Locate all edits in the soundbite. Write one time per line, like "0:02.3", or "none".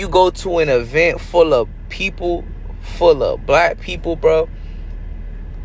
none

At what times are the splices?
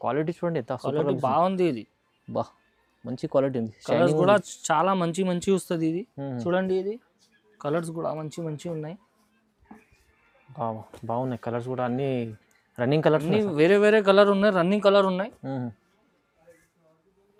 none

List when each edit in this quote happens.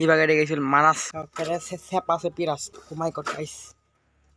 0:01.1

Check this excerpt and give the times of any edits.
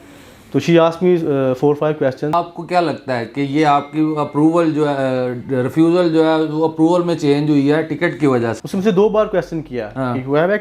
0:02.3
0:08.6

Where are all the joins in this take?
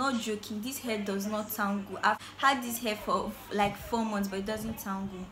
0:02.2

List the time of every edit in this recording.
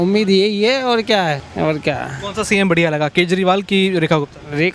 0:01.5

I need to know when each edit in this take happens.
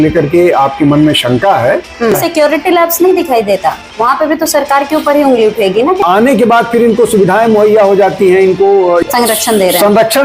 0:02.1
0:06.0
0:09.0

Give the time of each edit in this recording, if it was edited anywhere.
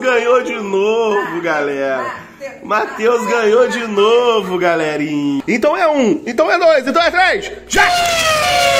0:05.4

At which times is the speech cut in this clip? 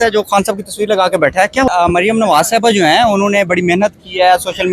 0:01.7

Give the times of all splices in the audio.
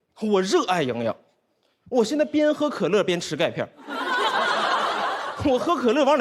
none

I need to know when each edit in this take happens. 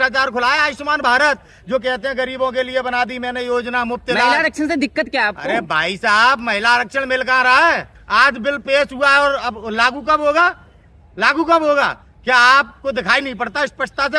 none

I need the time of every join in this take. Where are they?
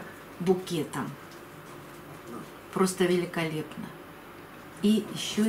none

